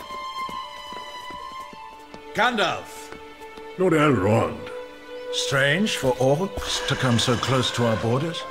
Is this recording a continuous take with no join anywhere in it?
no; 1 cut; at 2.0 s

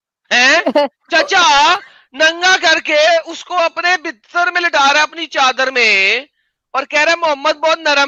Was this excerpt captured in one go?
yes; 0 cuts

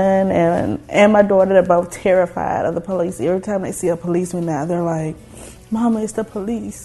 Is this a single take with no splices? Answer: yes; 0 cuts

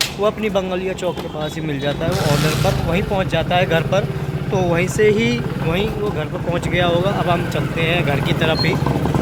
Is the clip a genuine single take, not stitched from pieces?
yes; 0 cuts

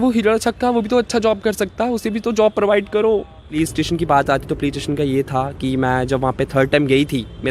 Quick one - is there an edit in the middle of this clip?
yes; 1 cut; at 3.5 s

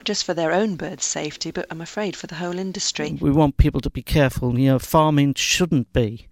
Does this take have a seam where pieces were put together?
yes; 1 cut; at 3.0 s

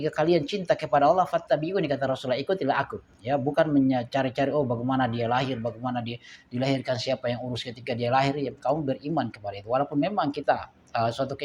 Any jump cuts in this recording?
no; 0 cuts

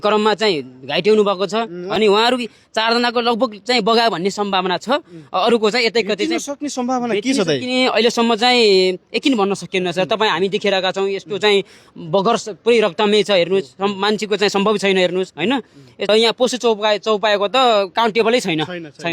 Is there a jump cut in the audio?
yes; 2 cuts; at 1.8 s, 16.1 s

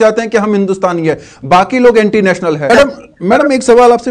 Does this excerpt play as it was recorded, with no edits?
no; 1 cut; at 2.7 s

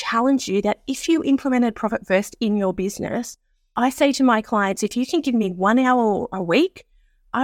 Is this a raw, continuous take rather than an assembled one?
yes; 0 cuts

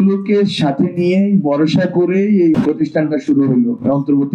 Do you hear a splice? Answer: no; 0 cuts

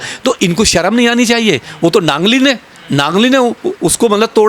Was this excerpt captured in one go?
yes; 0 cuts

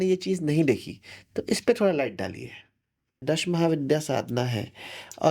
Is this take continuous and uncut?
no; 1 cut; at 3.2 s

